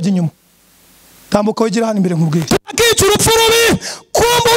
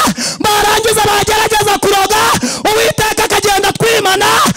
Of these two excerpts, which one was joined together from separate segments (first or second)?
first